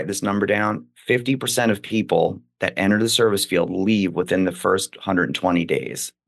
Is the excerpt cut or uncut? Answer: uncut